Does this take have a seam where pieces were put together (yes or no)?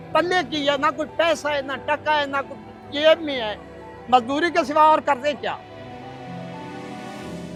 no